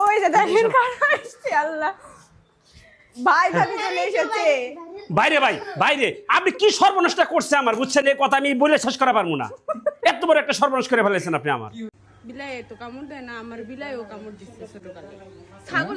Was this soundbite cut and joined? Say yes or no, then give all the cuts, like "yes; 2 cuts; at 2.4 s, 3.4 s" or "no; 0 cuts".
yes; 1 cut; at 11.9 s